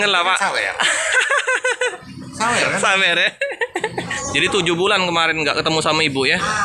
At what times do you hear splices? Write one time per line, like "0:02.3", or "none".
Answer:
0:04.2

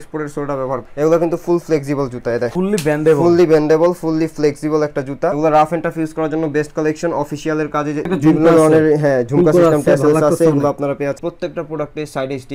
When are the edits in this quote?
0:00.9
0:02.5
0:05.4
0:08.1
0:11.2

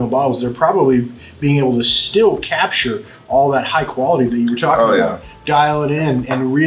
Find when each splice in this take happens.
none

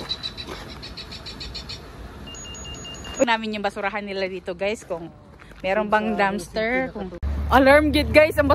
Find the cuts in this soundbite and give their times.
0:03.3
0:07.3

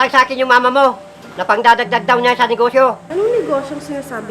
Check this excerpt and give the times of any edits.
0:03.0

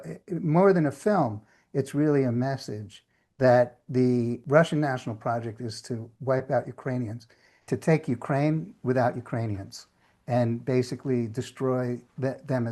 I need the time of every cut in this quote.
0:04.4
0:07.6

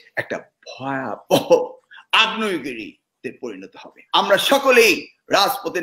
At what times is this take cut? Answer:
0:03.9

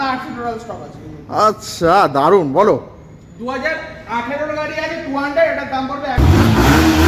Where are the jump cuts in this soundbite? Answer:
0:06.2

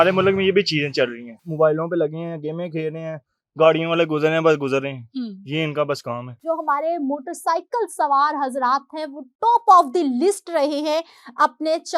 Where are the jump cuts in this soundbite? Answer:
0:01.4
0:06.3

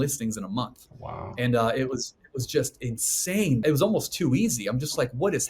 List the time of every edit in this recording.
0:03.6

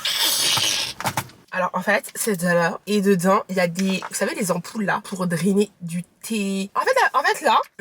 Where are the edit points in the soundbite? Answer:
0:02.8
0:06.7

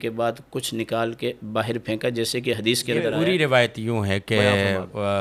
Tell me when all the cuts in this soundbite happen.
0:03.1

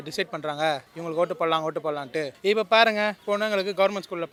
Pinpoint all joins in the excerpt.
none

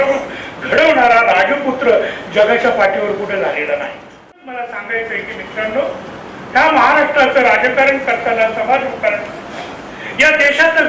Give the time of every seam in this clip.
0:04.4

